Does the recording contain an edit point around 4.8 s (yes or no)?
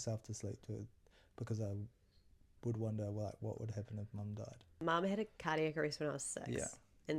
yes